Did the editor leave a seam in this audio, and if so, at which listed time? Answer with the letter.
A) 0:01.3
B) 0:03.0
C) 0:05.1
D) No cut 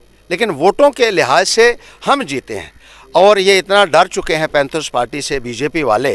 D